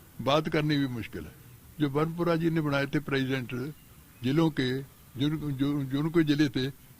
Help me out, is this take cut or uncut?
cut